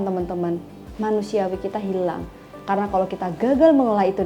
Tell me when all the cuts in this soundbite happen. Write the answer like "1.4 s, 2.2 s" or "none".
2.5 s